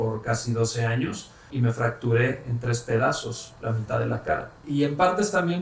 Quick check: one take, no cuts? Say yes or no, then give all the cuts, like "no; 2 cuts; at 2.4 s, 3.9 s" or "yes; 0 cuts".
no; 2 cuts; at 1.5 s, 4.6 s